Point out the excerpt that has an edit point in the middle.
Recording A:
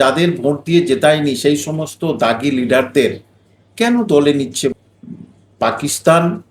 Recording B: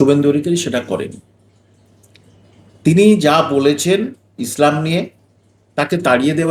A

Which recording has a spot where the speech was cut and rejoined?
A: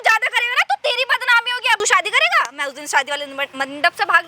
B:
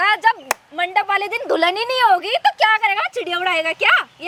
A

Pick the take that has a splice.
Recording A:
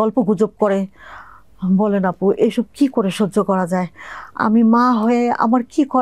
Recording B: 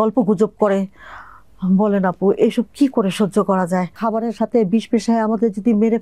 B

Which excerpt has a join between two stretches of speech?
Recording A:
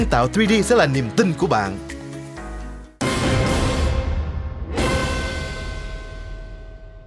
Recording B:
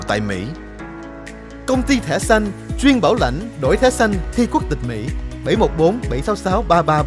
A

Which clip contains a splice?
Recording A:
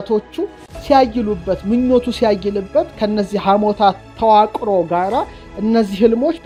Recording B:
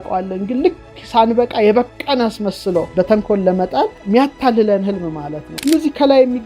B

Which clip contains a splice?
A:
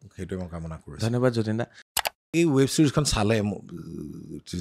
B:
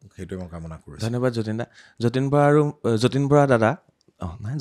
A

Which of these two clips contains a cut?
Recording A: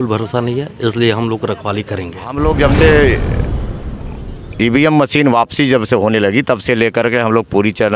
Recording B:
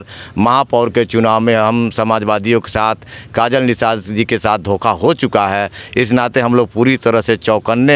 A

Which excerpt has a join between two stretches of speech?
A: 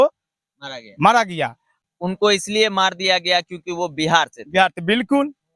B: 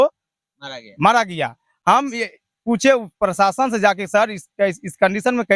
A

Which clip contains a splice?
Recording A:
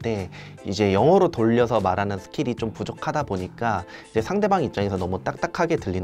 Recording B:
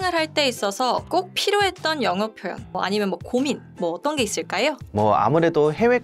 B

